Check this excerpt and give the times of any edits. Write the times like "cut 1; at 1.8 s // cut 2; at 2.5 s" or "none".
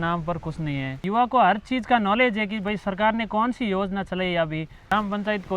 cut 1; at 1.0 s // cut 2; at 4.9 s